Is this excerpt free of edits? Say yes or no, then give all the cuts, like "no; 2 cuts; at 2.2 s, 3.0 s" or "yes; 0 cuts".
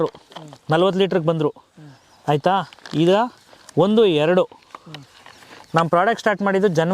yes; 0 cuts